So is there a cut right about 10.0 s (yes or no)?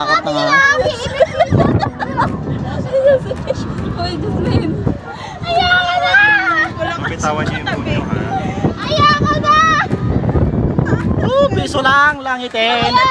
yes